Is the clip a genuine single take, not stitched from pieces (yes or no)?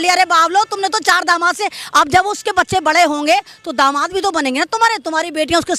yes